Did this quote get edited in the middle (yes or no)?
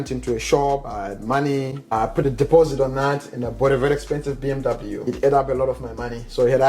yes